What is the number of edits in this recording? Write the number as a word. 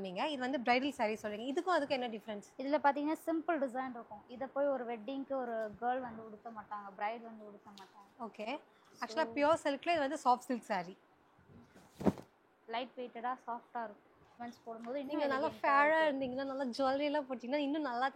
two